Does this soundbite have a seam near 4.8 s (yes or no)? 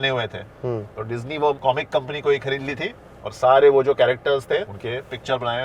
yes